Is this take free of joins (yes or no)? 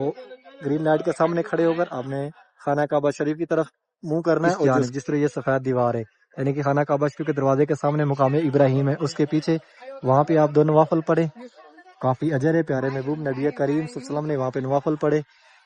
no